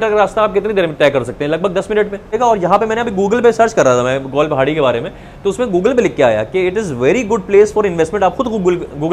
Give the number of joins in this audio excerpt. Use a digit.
1